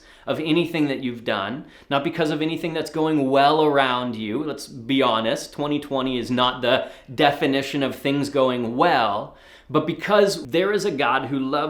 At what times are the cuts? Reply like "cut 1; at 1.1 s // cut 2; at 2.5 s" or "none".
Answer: cut 1; at 10.4 s